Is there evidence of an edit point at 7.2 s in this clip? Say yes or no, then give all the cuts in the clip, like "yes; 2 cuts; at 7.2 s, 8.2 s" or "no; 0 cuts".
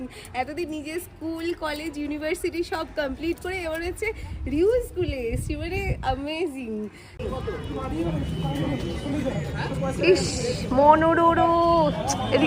yes; 1 cut; at 7.2 s